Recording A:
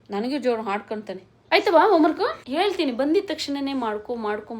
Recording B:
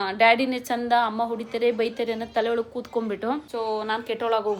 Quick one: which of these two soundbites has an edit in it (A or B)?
A